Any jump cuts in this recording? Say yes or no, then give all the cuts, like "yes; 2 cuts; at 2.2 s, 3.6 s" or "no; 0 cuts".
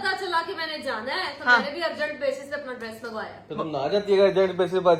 no; 0 cuts